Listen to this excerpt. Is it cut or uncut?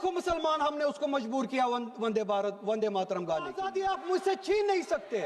cut